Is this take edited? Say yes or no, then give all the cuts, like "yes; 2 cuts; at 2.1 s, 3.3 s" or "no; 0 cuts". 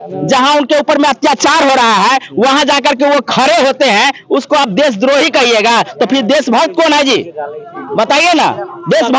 no; 0 cuts